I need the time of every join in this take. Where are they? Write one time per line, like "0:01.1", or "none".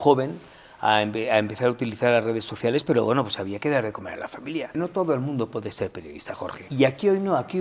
0:04.8
0:06.6